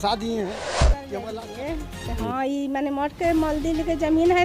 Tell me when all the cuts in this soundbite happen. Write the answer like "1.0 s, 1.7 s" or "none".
1.0 s